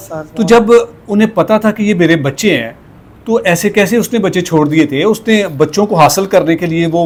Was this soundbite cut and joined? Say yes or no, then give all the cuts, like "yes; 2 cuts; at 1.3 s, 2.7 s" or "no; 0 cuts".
no; 0 cuts